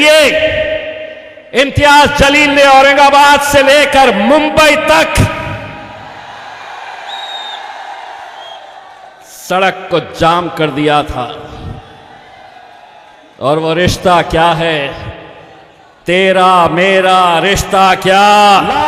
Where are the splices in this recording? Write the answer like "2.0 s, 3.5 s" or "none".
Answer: none